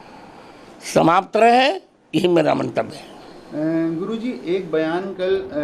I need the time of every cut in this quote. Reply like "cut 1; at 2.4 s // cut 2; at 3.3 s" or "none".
none